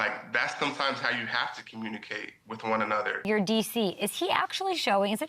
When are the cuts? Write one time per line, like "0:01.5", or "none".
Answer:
0:03.2